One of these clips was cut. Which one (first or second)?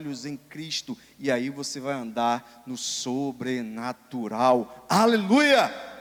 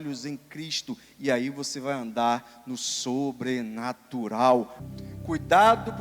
second